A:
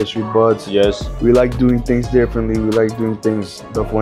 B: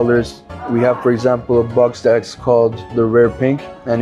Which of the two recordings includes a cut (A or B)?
B